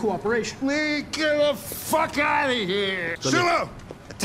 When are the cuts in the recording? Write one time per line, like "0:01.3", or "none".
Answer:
0:03.2